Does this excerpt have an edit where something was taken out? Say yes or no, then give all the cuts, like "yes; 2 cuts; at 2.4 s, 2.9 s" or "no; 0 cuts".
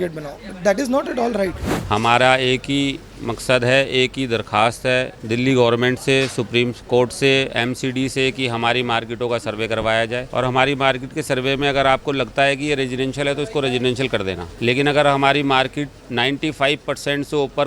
yes; 4 cuts; at 1.7 s, 5.2 s, 10.3 s, 14.5 s